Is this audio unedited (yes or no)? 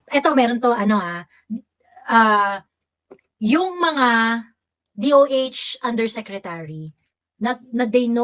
yes